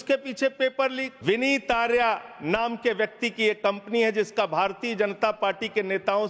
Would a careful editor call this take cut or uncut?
cut